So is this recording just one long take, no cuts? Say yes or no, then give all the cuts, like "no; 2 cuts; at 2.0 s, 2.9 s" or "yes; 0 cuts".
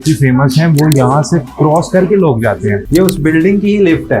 no; 1 cut; at 2.8 s